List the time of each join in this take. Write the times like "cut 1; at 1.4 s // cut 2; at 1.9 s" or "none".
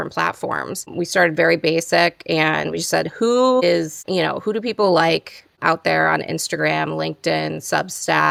none